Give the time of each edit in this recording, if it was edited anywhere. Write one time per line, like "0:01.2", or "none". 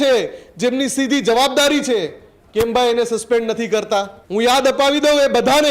0:04.2